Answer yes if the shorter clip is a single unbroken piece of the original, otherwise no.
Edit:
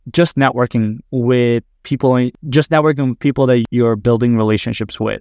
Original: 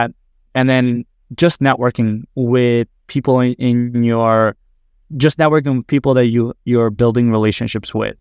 no